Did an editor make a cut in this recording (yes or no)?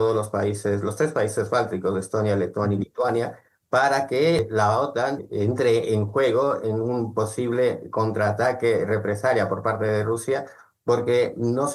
no